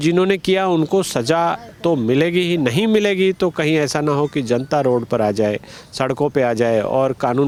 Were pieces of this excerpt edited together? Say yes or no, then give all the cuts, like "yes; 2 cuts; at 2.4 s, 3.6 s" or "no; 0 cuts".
no; 0 cuts